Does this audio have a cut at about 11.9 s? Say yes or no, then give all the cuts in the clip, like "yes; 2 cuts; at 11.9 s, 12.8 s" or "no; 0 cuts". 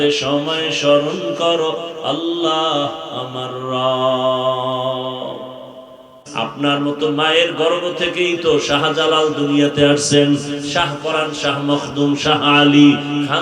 no; 1 cut; at 6.3 s